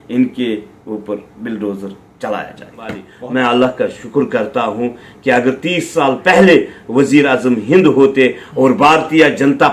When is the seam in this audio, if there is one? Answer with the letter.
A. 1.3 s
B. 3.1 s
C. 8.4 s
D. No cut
B